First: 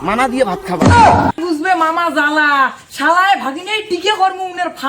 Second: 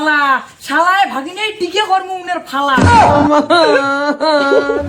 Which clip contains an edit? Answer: first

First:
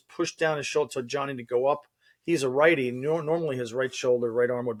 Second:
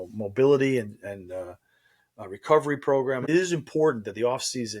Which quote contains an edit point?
second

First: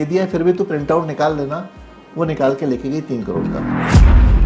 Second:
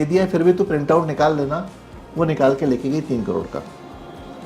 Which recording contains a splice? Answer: first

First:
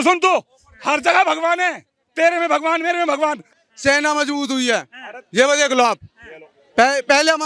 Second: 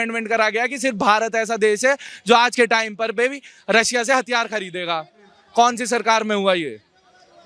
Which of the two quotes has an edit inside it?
first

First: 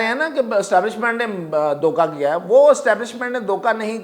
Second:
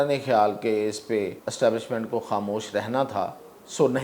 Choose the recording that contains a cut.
second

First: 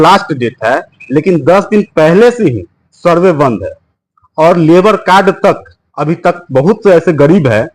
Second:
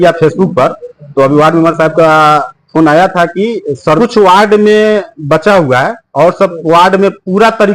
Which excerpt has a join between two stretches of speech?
second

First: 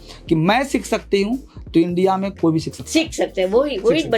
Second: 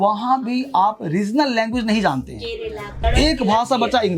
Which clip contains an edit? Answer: second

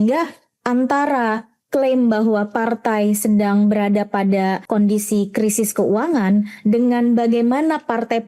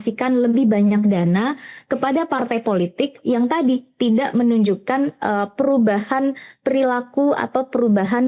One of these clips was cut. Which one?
first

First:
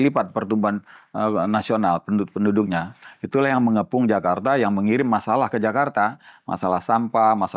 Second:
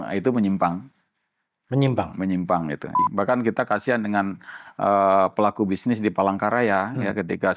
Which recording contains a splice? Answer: second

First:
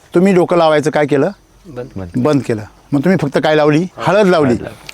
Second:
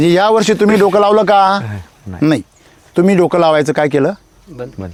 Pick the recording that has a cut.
first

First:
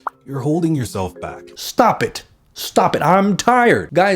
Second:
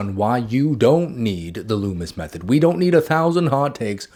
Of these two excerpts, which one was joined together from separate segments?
first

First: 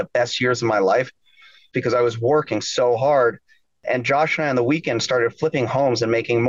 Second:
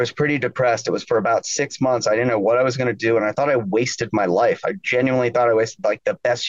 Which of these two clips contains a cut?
first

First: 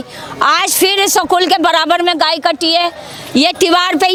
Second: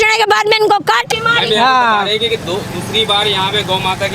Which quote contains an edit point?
second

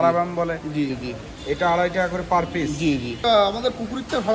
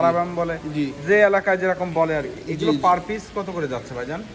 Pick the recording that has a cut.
first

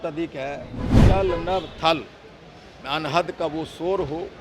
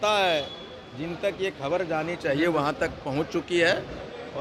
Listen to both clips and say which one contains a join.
first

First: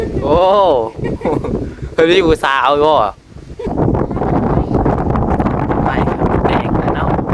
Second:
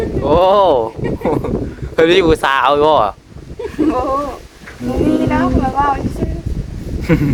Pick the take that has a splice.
first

